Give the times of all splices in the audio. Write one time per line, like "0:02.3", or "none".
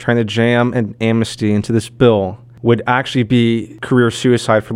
0:02.4
0:03.7